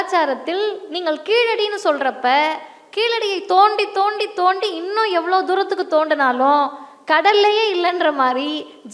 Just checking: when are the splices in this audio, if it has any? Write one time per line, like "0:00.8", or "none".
none